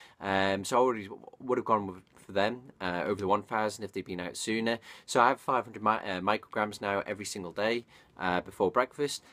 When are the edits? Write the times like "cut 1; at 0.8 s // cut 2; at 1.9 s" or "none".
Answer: none